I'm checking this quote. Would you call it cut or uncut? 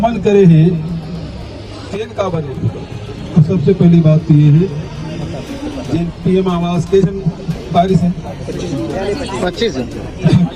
uncut